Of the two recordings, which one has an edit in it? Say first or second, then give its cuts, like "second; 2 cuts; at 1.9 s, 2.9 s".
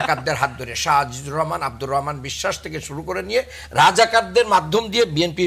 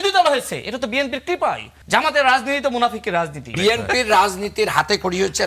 second; 2 cuts; at 1.7 s, 3.5 s